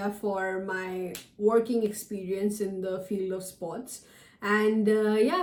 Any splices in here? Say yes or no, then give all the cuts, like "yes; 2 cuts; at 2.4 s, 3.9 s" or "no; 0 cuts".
no; 0 cuts